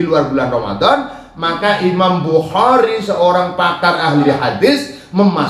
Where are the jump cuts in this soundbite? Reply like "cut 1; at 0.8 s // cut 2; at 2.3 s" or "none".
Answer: cut 1; at 4.2 s